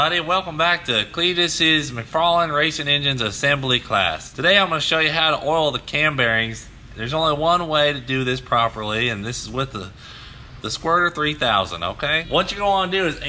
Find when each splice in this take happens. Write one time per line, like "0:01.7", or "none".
0:04.3
0:12.2